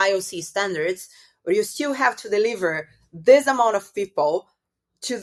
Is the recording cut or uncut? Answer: uncut